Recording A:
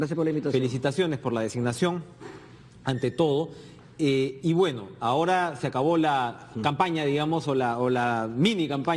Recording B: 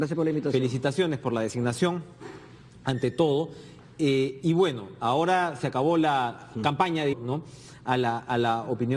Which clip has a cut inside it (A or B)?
A